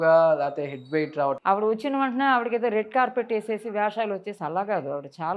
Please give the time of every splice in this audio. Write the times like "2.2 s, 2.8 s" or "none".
1.4 s